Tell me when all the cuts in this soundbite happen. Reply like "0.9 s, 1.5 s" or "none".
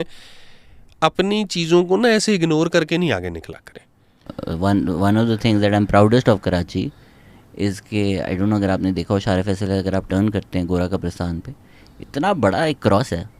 4.3 s